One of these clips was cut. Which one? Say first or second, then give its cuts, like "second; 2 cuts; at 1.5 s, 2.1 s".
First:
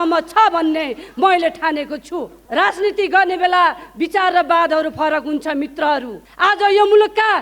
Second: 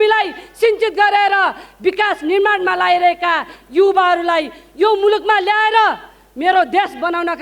first; 2 cuts; at 2.4 s, 6.2 s